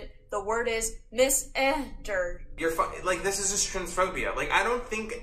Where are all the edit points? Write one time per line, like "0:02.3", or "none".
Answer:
0:02.4